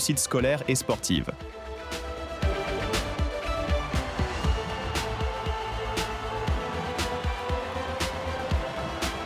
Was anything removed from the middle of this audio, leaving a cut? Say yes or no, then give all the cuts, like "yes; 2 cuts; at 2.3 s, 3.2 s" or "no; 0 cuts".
yes; 1 cut; at 1.5 s